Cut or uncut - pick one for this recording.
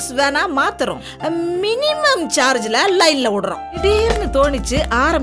cut